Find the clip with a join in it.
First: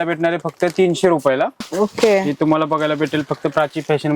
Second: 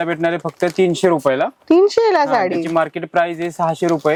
first; 1 cut; at 1.6 s

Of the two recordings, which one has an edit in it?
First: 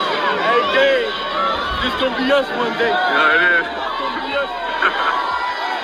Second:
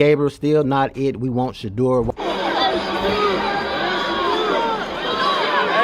second; 1 cut; at 2.2 s

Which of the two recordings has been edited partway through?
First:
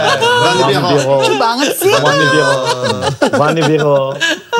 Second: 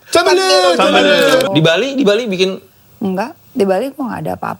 second; 1 cut; at 1.5 s

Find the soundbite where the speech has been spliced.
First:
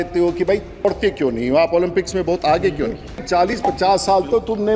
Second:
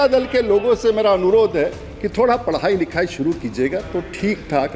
first; 2 cuts; at 0.8 s, 3.5 s

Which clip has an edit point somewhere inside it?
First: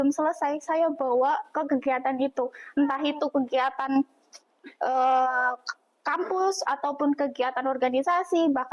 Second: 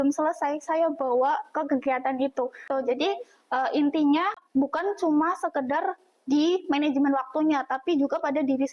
second; 2 cuts; at 2.7 s, 4.4 s

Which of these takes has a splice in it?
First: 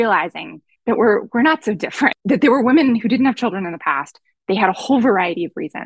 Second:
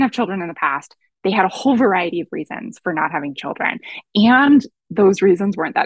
first; 1 cut; at 2.2 s

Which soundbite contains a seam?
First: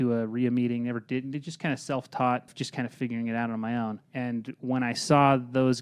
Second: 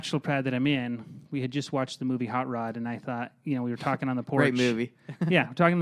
first; 2 cuts; at 2.6 s, 4.0 s

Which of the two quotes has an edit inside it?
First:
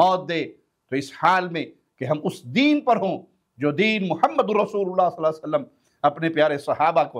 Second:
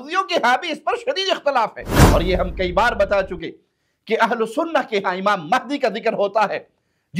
second; 1 cut; at 1.9 s

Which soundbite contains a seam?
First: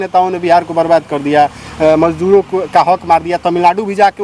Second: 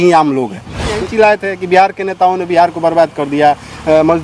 second; 1 cut; at 1.0 s

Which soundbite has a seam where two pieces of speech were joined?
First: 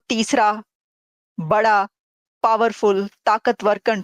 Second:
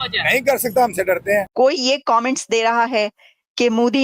second; 1 cut; at 1.5 s

